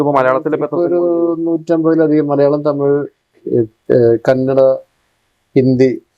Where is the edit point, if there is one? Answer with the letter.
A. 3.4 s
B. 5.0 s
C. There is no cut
C